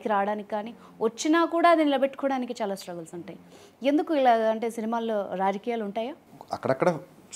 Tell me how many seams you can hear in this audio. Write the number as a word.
one